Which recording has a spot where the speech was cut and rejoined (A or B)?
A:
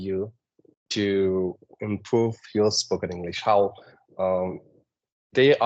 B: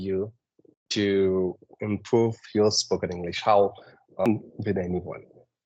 B